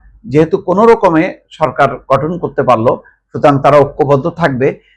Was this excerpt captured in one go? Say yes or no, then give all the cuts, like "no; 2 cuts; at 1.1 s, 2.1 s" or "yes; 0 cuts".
yes; 0 cuts